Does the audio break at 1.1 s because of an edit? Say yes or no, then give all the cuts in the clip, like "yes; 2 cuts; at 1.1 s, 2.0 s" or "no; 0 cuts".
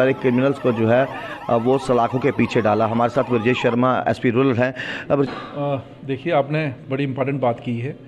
no; 1 cut; at 5.3 s